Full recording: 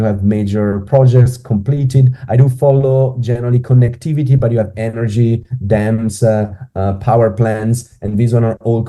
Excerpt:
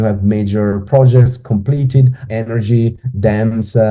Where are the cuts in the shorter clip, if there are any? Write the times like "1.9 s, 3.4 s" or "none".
2.2 s